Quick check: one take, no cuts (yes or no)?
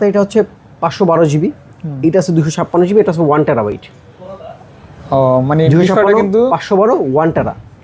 yes